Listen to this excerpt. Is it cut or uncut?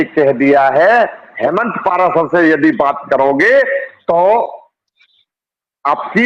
cut